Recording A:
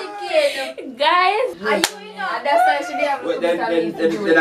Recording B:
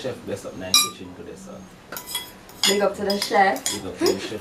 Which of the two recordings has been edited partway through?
A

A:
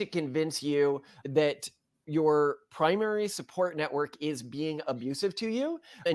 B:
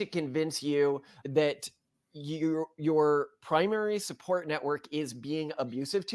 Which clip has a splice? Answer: A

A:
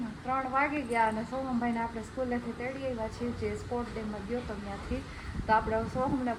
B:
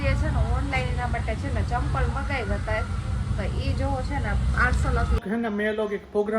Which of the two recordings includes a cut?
B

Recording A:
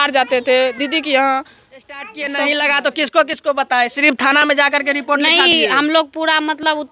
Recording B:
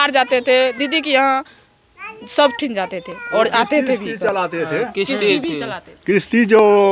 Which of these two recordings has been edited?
A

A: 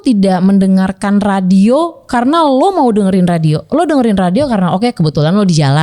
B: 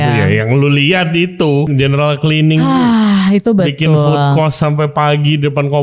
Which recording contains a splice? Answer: B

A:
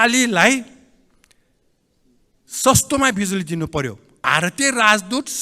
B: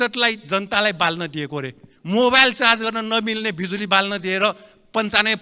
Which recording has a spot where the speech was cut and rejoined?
A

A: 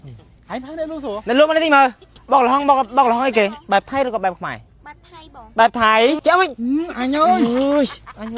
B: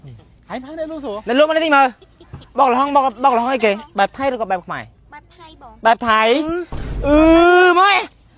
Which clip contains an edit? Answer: A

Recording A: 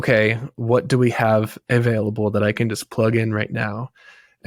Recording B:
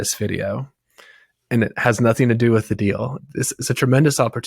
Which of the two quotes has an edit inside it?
B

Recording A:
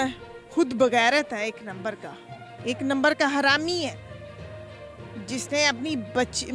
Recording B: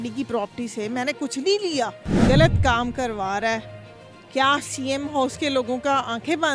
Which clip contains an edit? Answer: B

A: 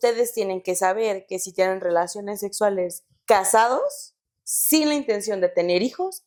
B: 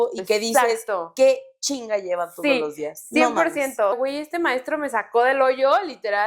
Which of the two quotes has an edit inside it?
B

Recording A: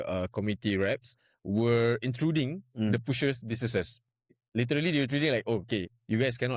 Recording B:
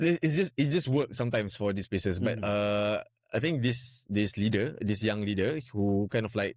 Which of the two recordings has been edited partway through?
A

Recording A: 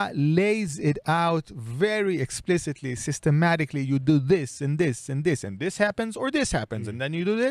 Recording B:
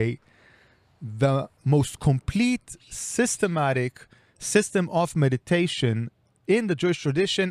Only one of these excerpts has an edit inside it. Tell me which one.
B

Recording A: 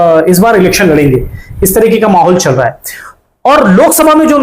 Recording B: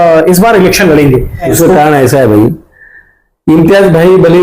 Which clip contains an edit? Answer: B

